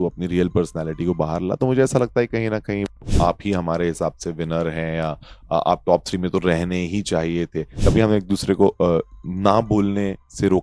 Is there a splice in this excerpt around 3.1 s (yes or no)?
yes